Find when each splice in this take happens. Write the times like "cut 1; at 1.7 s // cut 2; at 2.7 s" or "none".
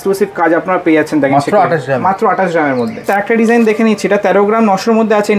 cut 1; at 3.0 s